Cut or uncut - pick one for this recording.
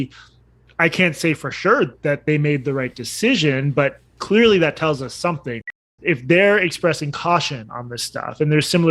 cut